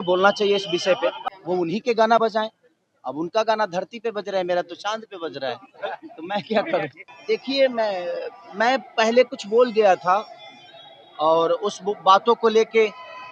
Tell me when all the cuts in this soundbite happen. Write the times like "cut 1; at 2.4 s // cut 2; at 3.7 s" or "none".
cut 1; at 1.2 s // cut 2; at 7.1 s

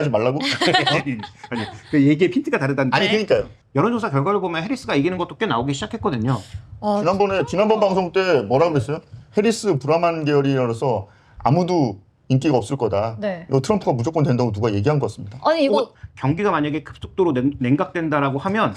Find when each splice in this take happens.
cut 1; at 3.6 s // cut 2; at 16.0 s

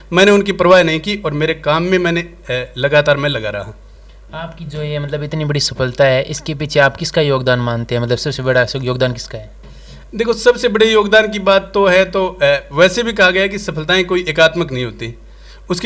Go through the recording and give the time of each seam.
none

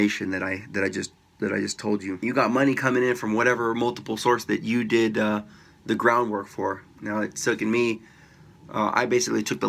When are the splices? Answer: cut 1; at 2.1 s

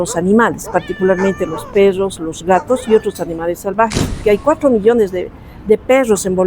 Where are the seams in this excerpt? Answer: cut 1; at 4.2 s

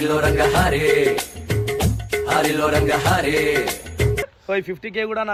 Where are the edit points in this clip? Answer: none

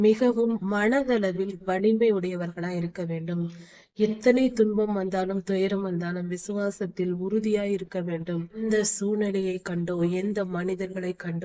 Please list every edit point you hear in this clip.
cut 1; at 8.5 s

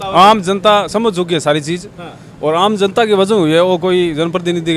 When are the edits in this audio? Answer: none

